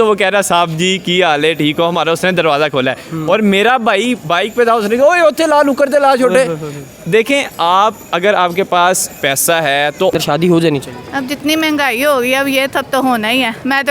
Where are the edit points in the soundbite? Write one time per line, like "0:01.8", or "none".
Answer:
0:10.2